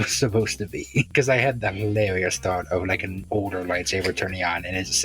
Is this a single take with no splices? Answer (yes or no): no